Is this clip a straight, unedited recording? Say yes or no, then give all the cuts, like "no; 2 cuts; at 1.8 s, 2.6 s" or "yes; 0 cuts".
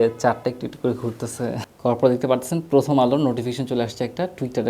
no; 1 cut; at 1.7 s